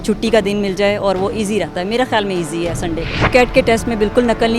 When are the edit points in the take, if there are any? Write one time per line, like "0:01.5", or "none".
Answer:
0:03.3